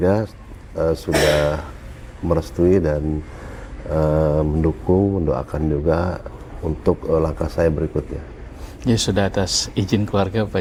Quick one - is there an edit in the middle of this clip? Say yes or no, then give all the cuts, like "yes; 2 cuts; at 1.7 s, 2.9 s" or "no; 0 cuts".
no; 0 cuts